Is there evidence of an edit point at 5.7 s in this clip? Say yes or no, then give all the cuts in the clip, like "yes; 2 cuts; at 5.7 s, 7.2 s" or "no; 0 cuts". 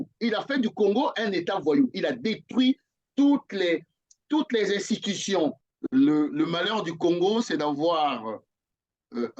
yes; 1 cut; at 5.7 s